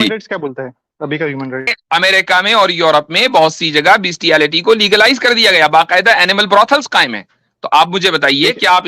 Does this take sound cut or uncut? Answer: cut